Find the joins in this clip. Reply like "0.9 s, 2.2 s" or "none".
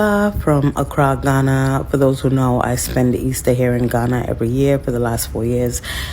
2.5 s